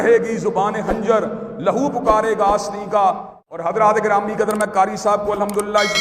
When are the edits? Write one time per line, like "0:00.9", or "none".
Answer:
0:03.3